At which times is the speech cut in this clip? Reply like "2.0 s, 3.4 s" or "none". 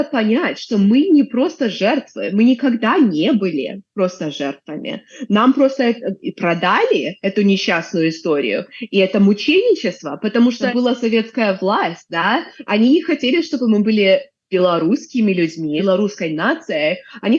10.6 s, 15.8 s